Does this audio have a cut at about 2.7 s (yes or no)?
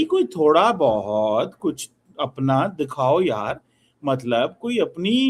no